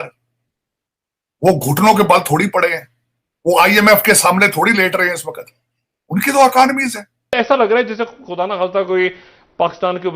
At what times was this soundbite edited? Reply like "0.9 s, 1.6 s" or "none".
7.3 s

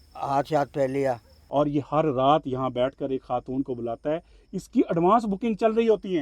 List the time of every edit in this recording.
1.3 s

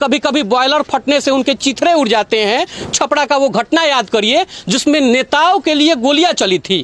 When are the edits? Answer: 2.8 s

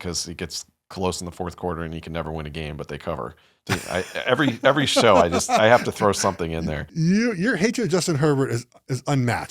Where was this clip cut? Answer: 3.5 s, 6.9 s

